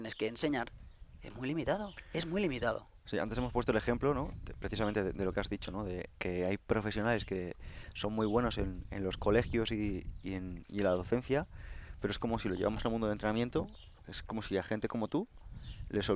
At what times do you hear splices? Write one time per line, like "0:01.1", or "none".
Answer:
none